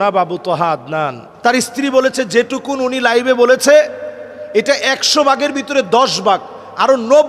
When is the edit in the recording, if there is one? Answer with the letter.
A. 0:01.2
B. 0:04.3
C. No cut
A